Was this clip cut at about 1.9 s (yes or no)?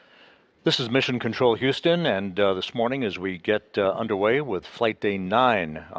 no